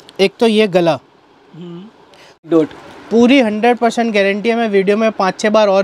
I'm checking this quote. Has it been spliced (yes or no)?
yes